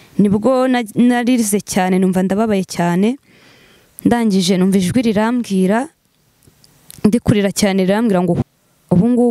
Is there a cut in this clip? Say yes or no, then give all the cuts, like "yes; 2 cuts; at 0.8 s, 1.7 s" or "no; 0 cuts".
yes; 1 cut; at 8.4 s